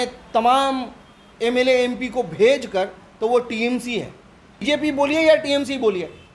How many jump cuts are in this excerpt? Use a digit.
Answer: 1